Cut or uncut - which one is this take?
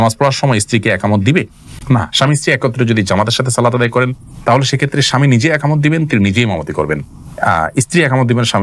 uncut